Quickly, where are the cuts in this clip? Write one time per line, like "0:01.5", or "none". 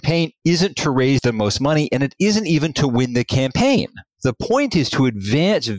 0:01.2